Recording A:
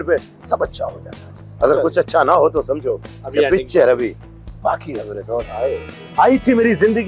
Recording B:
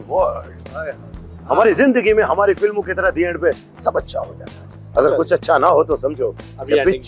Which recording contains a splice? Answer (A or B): A